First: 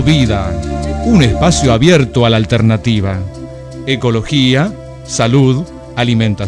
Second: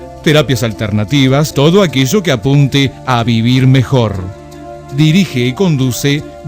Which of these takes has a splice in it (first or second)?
second